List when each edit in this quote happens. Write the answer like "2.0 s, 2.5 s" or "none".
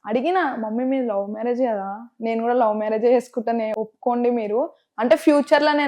3.7 s